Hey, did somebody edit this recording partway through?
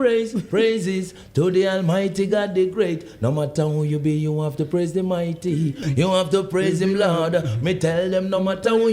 yes; 1 cut; at 5.8 s

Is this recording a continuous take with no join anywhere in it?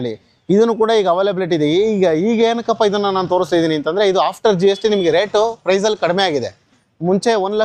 yes; 0 cuts

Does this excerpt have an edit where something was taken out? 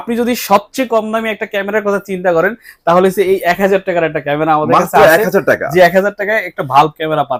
no; 0 cuts

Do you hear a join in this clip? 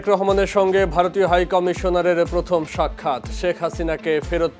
no; 0 cuts

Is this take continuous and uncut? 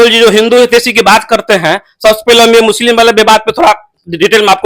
yes; 0 cuts

